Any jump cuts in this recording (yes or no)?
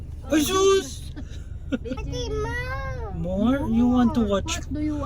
yes